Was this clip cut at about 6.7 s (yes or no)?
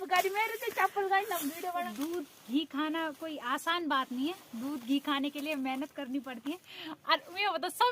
yes